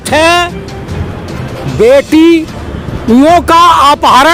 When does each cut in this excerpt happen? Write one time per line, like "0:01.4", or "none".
none